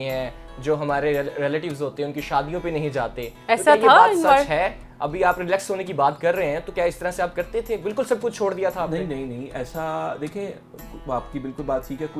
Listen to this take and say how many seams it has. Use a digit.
0